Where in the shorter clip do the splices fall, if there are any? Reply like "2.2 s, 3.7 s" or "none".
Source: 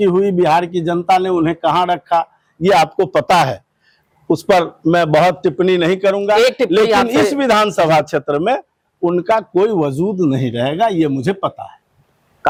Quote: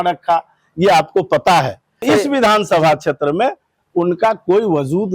2.0 s